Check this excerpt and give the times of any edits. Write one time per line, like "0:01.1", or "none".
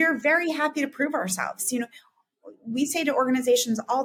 none